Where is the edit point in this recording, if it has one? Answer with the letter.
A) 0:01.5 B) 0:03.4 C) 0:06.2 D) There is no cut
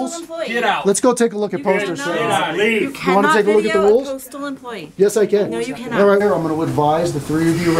C